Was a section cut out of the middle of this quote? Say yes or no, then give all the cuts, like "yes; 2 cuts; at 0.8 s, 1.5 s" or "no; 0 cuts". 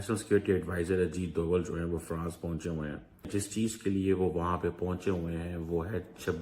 yes; 1 cut; at 3.3 s